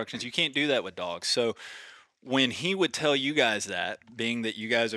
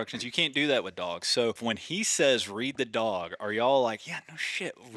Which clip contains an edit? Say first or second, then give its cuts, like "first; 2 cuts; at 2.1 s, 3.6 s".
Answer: second; 1 cut; at 1.6 s